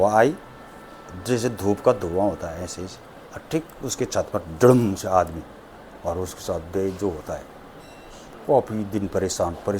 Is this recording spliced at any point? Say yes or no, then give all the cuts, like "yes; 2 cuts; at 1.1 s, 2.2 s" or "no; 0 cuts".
no; 0 cuts